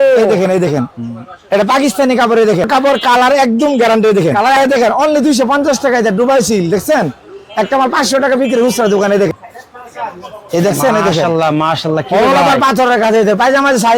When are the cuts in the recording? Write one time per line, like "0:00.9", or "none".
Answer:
0:02.7
0:04.6
0:09.3